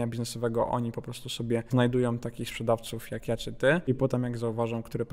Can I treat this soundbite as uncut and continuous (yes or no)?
no